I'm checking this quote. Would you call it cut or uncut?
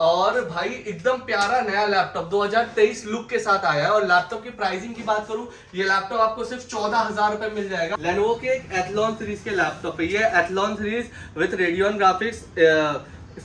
cut